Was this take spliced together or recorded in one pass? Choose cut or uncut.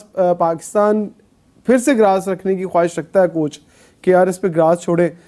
uncut